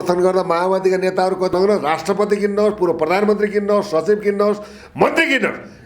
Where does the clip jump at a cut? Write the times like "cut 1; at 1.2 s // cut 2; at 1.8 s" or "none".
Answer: cut 1; at 1.5 s

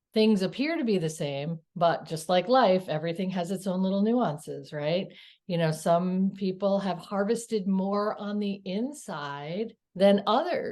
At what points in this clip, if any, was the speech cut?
cut 1; at 1.6 s // cut 2; at 9.8 s

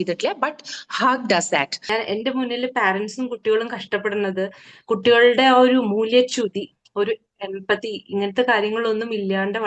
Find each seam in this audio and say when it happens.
cut 1; at 1.8 s

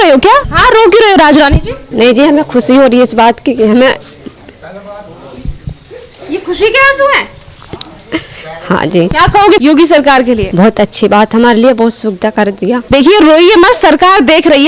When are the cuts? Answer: cut 1; at 9.6 s

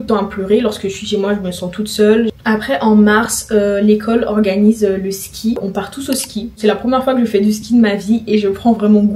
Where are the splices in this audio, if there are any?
none

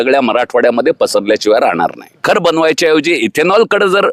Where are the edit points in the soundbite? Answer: cut 1; at 2.2 s

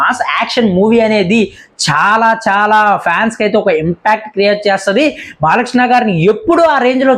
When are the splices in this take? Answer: none

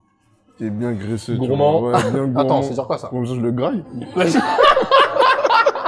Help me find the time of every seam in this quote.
none

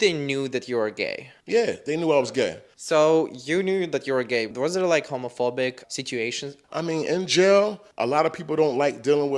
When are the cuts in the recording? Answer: none

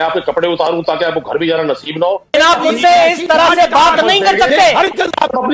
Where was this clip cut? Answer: cut 1; at 2.3 s

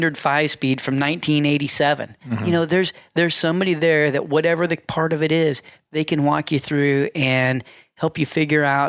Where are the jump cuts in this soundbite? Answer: none

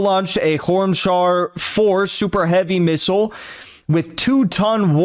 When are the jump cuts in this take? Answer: none

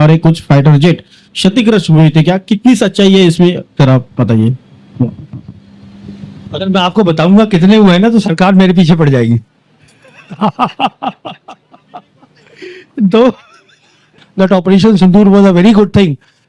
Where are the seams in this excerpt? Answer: cut 1; at 14.2 s

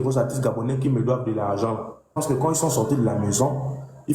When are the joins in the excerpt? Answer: cut 1; at 2.2 s

